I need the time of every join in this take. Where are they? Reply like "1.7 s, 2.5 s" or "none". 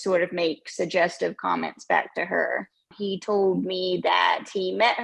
2.9 s